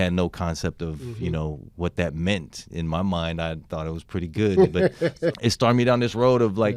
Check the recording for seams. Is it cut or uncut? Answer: cut